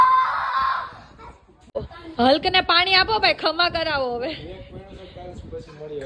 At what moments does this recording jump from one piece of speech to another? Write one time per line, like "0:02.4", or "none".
0:01.7